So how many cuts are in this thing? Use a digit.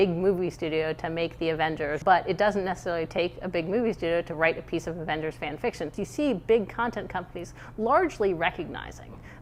2